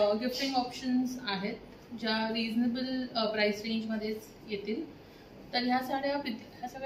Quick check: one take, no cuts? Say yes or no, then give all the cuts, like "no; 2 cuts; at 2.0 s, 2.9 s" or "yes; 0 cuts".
yes; 0 cuts